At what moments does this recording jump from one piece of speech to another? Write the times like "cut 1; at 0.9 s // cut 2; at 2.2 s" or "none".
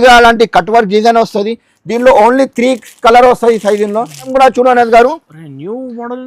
cut 1; at 4.3 s